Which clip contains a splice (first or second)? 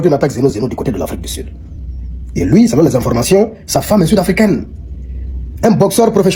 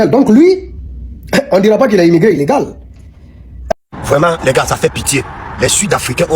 second